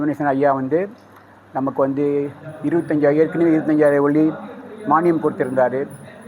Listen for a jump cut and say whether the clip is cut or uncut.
uncut